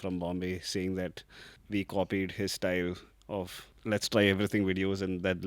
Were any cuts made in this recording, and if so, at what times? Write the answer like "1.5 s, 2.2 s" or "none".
1.6 s, 3.7 s